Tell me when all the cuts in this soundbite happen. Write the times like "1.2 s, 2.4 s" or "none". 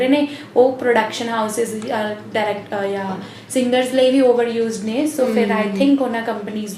none